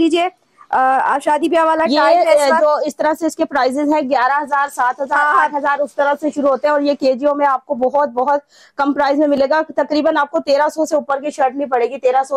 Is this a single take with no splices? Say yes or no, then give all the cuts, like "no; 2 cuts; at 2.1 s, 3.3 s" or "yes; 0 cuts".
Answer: yes; 0 cuts